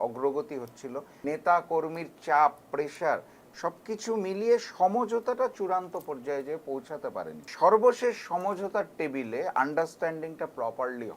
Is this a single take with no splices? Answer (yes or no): no